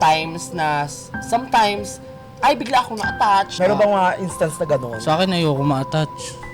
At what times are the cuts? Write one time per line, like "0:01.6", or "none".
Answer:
0:03.5